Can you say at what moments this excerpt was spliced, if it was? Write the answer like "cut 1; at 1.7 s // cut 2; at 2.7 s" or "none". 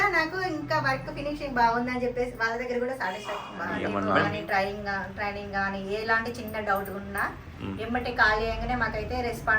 cut 1; at 3.8 s